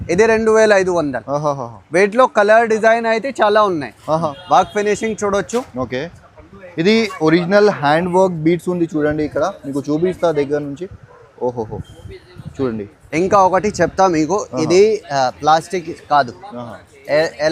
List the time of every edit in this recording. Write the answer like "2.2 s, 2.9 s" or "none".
4.3 s

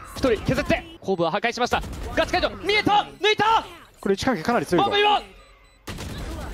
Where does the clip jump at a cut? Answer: 0.9 s

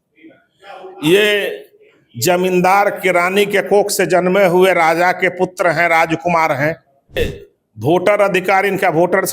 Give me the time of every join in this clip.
7.2 s

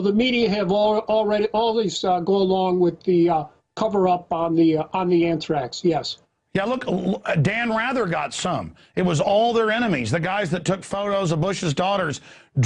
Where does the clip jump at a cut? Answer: 2.7 s

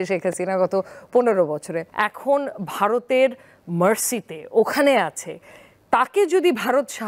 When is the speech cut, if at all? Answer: 1.8 s

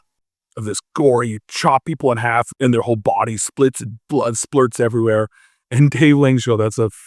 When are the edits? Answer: 2.5 s

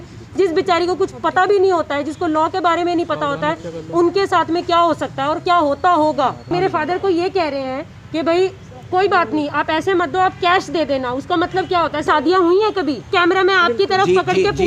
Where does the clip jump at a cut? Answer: 6.5 s, 12.1 s, 13.1 s

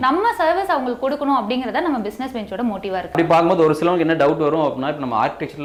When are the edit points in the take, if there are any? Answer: none

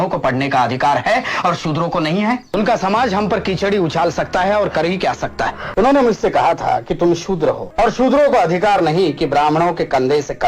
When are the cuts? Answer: 2.5 s, 5.6 s, 7.6 s

